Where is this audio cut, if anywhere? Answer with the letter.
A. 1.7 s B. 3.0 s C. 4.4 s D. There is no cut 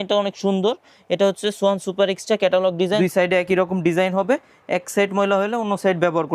B